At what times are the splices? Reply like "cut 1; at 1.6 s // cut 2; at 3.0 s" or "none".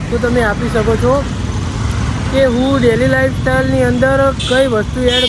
none